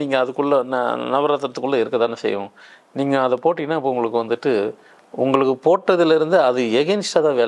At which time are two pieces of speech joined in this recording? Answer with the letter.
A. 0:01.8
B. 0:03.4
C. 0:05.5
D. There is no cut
D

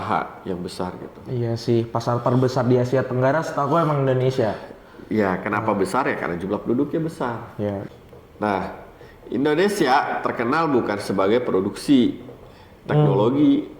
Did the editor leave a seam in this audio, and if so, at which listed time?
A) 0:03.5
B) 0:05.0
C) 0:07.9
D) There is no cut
C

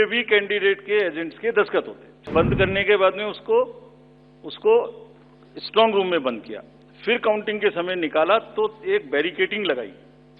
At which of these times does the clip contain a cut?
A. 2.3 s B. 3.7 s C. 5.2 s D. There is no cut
A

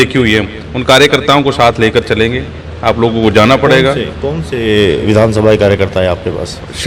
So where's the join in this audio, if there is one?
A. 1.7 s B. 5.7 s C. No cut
C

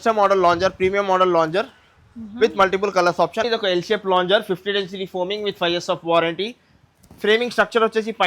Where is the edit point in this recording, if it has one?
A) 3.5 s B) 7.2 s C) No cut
A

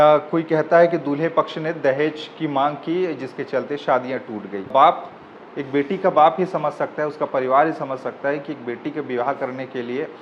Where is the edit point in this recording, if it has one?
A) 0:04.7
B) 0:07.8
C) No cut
A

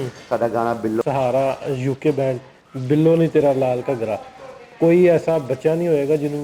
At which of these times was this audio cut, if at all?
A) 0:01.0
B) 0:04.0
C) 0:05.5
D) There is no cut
A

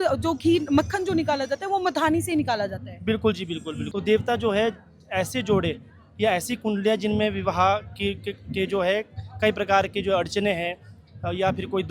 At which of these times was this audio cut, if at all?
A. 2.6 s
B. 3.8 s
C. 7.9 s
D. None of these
B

